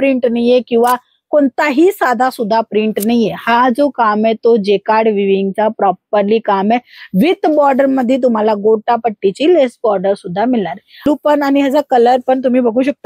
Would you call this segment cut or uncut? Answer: cut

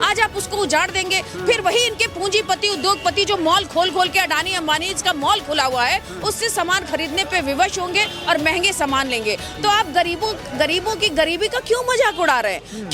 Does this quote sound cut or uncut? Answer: uncut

